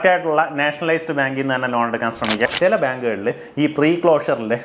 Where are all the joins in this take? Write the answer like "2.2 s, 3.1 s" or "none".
2.5 s